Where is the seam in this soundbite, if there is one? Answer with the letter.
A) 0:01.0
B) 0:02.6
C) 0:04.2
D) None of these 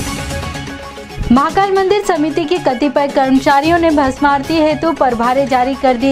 A